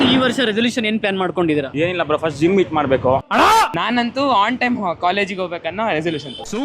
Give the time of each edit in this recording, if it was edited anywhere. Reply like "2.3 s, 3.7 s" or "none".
3.2 s